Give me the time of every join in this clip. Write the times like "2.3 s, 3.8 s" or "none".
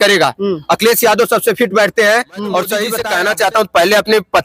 3.0 s